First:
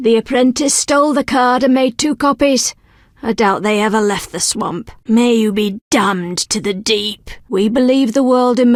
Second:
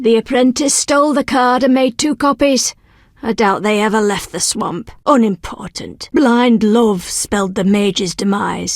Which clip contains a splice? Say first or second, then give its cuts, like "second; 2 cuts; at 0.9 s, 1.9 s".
second; 1 cut; at 4.9 s